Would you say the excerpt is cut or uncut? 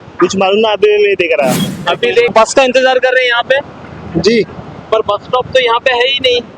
cut